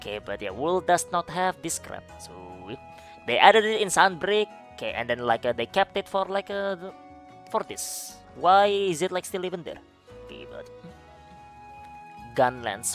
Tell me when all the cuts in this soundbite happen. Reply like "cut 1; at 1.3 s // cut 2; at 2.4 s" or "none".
cut 1; at 11.3 s

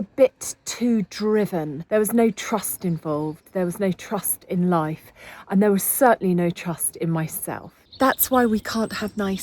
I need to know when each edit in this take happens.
cut 1; at 1.8 s // cut 2; at 7.7 s

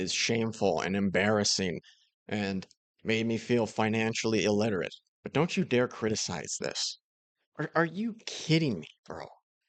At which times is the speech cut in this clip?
none

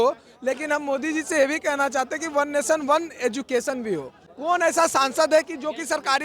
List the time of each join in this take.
cut 1; at 4.2 s

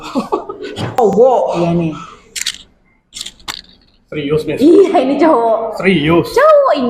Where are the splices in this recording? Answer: cut 1; at 1.1 s

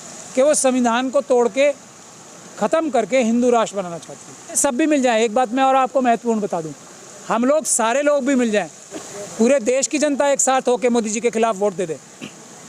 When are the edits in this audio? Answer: cut 1; at 4.6 s // cut 2; at 8.9 s

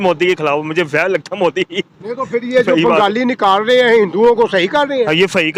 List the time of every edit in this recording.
none

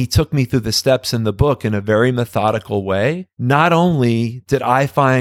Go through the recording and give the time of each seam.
cut 1; at 3.3 s

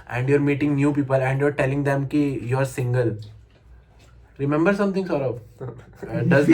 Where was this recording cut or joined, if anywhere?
none

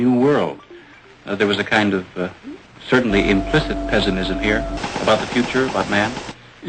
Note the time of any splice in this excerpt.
none

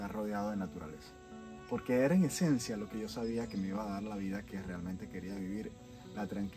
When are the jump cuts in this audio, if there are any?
none

